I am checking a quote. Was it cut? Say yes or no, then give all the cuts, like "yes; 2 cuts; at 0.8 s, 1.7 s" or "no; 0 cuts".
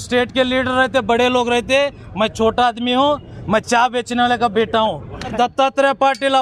yes; 1 cut; at 5.5 s